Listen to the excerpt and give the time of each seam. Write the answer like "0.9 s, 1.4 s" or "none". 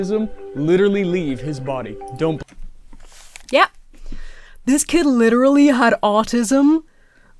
none